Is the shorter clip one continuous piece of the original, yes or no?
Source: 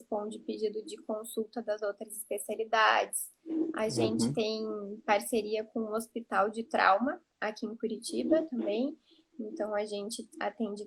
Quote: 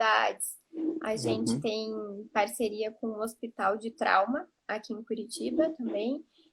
yes